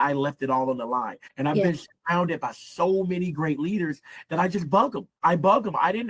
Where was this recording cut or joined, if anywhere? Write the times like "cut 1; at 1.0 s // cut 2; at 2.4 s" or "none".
cut 1; at 1.2 s // cut 2; at 5.1 s